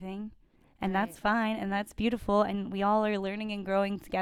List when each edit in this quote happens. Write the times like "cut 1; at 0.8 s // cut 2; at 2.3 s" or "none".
none